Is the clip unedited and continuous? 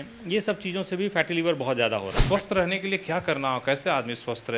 no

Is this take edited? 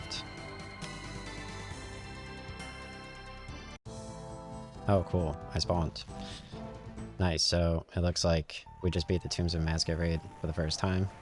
no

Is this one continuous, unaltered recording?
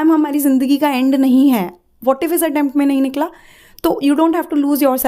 yes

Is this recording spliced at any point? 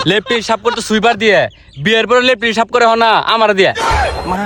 no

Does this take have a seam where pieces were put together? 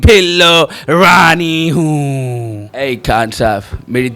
yes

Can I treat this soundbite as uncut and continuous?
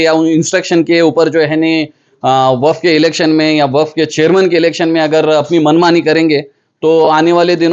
yes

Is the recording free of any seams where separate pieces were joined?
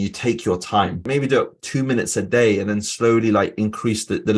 no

